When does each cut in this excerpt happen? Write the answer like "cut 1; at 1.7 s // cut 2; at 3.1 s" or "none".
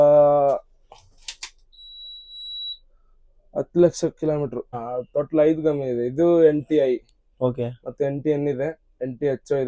cut 1; at 4.8 s